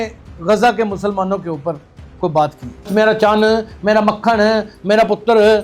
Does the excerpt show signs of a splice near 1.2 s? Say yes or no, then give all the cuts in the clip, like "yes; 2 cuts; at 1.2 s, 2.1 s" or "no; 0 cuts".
no; 1 cut; at 2.9 s